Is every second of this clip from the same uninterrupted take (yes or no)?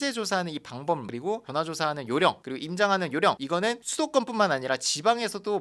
yes